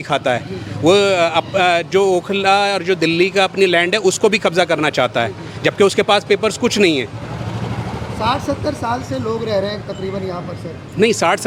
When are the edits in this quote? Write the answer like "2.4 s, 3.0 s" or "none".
none

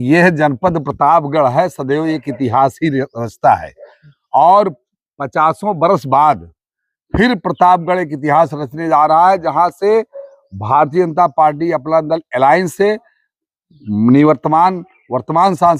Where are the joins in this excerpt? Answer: none

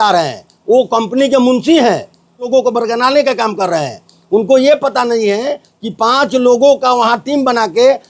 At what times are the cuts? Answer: 2.5 s

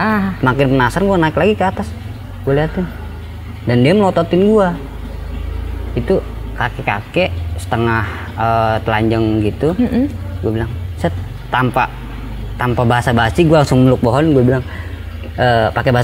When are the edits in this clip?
4.9 s

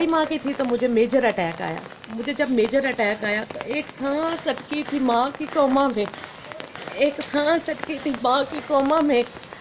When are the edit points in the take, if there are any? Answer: none

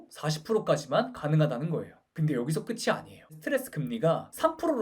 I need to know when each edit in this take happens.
2.0 s, 3.3 s

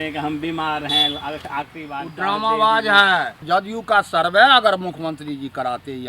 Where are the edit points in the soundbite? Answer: 3.4 s

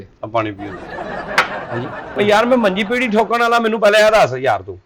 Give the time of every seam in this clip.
2.1 s

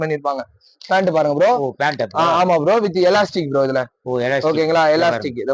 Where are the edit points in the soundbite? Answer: none

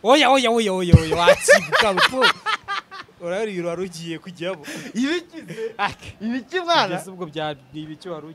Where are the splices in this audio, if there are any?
none

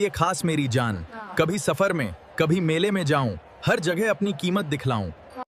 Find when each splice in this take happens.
none

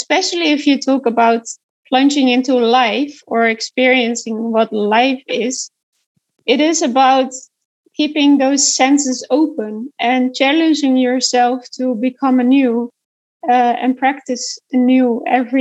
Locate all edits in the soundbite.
1.6 s, 6.2 s

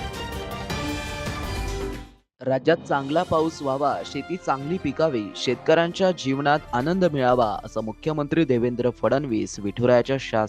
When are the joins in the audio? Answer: 2.0 s

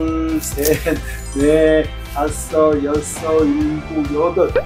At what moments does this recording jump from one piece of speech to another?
none

